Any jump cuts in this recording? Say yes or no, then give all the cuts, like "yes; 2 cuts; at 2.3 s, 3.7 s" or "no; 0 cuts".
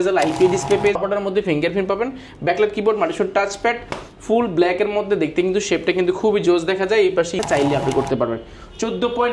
yes; 2 cuts; at 1.0 s, 7.4 s